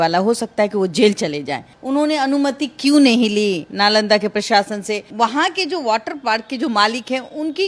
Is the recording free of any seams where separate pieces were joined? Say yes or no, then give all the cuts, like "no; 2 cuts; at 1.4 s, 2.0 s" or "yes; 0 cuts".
no; 2 cuts; at 1.7 s, 5.0 s